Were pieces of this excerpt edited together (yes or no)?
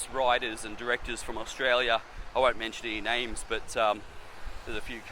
no